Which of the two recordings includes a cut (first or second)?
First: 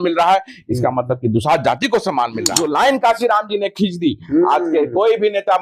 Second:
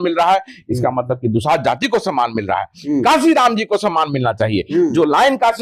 first